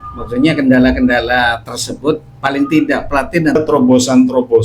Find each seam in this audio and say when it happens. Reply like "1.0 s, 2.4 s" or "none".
3.6 s